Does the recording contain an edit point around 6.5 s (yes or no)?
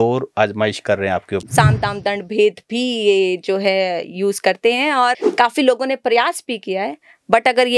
no